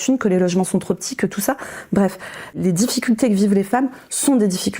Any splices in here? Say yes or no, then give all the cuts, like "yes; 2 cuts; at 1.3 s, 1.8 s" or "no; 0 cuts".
yes; 1 cut; at 2.6 s